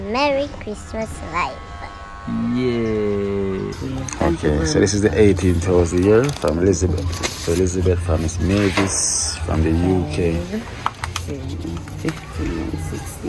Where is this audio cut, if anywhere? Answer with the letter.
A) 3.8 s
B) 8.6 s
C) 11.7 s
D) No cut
A